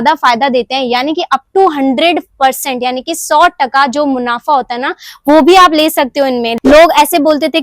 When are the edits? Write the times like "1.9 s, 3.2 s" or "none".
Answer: 6.5 s